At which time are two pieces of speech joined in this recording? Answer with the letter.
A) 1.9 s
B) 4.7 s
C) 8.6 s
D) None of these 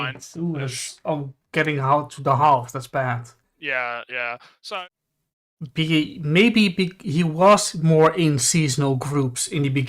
B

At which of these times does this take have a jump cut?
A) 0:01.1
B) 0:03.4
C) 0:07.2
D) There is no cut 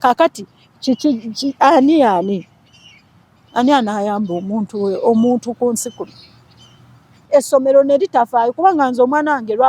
C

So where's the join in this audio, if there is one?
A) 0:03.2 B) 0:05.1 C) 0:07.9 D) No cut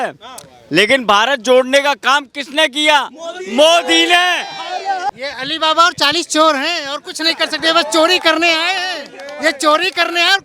B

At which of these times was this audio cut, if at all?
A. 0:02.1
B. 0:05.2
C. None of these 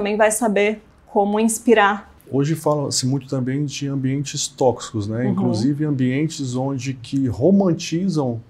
A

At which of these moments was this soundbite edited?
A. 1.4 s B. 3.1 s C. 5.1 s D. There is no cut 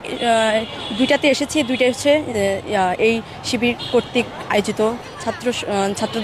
C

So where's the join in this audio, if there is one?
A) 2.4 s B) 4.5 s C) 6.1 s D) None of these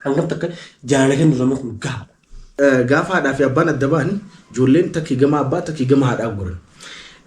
A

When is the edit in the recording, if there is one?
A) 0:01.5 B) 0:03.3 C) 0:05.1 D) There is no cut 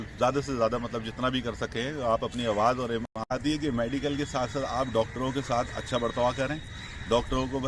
B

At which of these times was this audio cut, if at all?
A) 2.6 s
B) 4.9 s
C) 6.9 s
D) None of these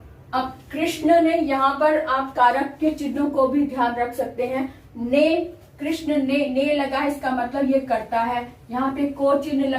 D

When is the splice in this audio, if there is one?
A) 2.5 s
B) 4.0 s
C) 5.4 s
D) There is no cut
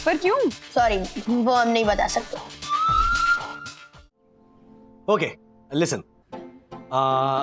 B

